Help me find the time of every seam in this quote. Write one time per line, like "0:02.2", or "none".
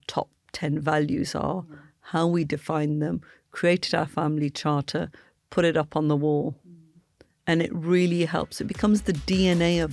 none